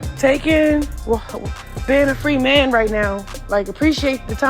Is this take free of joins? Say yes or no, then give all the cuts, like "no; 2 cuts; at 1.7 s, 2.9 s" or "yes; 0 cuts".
no; 1 cut; at 3.3 s